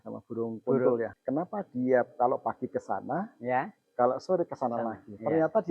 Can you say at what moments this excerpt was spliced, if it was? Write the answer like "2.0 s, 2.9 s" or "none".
1.1 s